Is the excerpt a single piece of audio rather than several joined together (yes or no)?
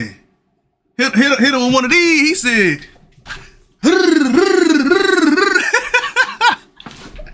yes